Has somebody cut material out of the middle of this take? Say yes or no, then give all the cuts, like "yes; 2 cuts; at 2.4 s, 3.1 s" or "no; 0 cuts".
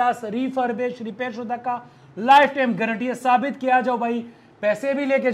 no; 0 cuts